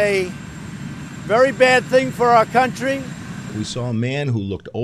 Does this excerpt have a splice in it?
yes; 1 cut; at 3.5 s

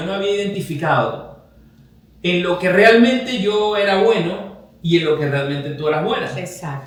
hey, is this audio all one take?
yes; 0 cuts

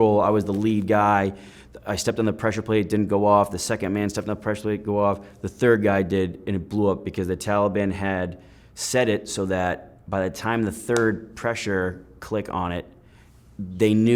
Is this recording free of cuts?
yes; 0 cuts

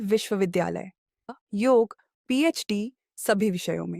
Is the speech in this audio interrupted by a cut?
yes; 1 cut; at 1.3 s

